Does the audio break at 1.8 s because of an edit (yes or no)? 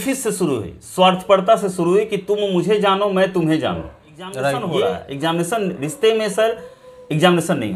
no